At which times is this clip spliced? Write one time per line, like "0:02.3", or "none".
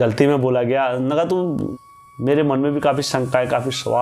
0:01.7